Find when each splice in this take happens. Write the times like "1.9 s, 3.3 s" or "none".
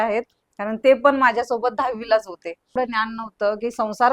2.8 s